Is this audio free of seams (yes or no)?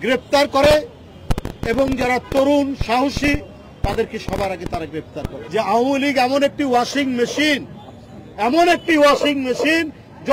no